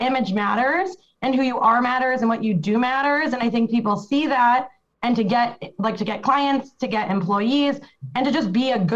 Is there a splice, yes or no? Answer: no